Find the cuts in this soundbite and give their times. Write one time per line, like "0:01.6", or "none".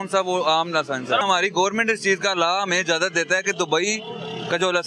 0:01.2